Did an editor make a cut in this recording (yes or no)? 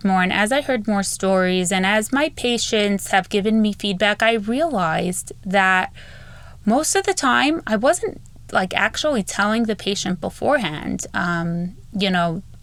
no